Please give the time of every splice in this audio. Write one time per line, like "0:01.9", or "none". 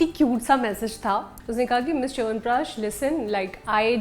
0:01.4